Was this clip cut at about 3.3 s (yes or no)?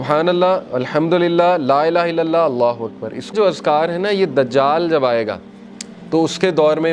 yes